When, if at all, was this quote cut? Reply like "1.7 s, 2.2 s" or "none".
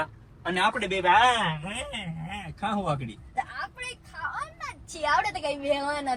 none

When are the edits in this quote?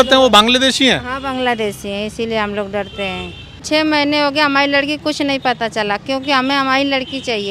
3.6 s

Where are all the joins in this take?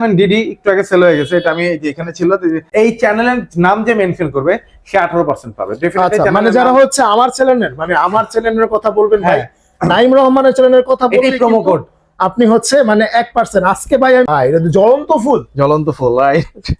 2.6 s, 14.3 s

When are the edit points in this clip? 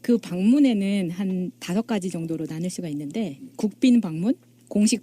2.2 s

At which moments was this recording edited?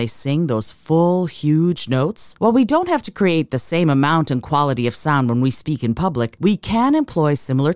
2.2 s, 6.3 s

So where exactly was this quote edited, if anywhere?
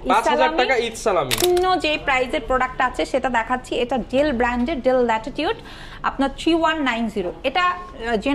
1.4 s

